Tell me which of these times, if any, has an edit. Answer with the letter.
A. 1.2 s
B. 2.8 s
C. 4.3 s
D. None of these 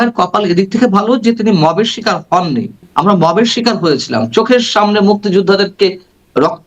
B